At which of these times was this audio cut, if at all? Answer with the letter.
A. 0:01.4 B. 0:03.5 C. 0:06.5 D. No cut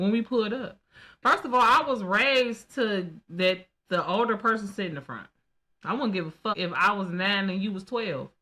C